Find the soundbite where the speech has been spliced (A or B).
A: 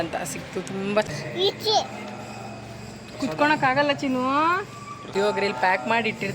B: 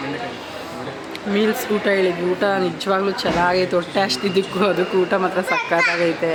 A